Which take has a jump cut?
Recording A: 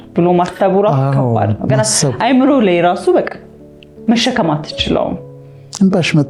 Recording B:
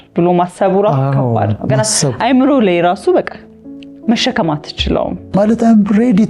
B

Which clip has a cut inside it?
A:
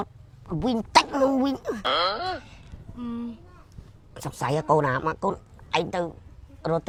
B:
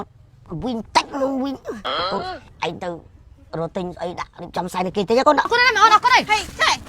B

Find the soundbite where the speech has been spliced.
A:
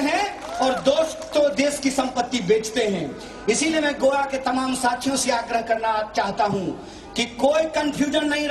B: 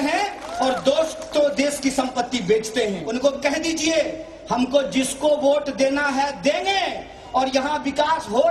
B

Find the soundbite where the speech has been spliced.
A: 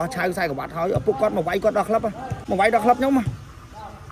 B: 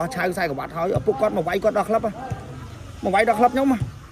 A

